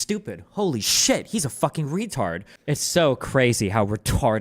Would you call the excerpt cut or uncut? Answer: cut